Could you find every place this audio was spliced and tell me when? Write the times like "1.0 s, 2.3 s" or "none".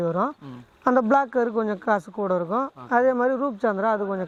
none